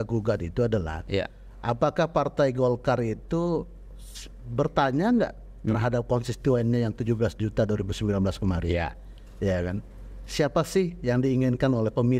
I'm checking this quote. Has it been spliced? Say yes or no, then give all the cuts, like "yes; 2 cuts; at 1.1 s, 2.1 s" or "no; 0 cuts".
no; 0 cuts